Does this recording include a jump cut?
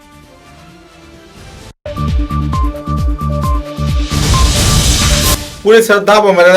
yes; 2 cuts; at 1.7 s, 5.4 s

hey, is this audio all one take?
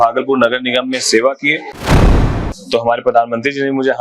no; 1 cut; at 2.0 s

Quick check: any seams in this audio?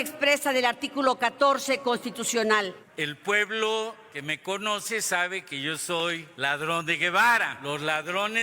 yes; 4 cuts; at 2.9 s, 4.1 s, 6.3 s, 7.5 s

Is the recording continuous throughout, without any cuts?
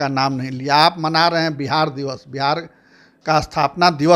yes; 0 cuts

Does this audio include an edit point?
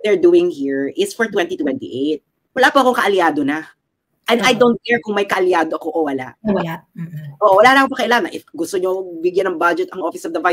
yes; 1 cut; at 2.4 s

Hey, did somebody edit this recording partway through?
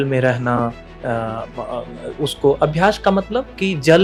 no; 0 cuts

